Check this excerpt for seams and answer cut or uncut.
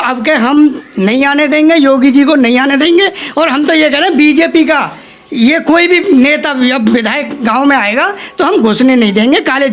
uncut